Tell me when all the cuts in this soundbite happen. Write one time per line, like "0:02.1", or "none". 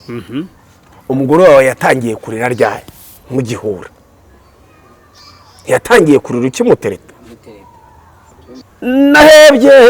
0:08.6